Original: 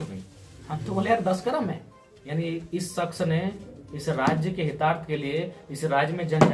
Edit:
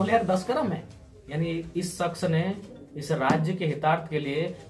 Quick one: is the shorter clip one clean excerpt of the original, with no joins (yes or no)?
yes